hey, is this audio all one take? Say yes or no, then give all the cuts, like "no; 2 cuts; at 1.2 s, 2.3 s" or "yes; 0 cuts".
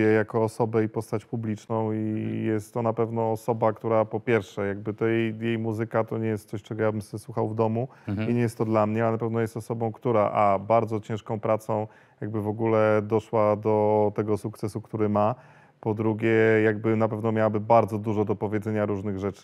yes; 0 cuts